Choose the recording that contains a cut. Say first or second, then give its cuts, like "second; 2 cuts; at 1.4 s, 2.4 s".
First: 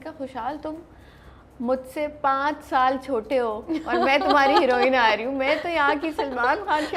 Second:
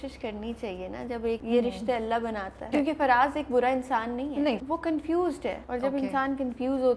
second; 4 cuts; at 1.4 s, 2.6 s, 4.6 s, 5.6 s